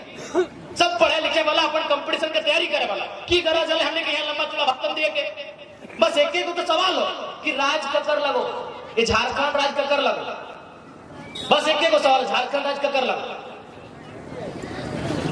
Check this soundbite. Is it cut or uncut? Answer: uncut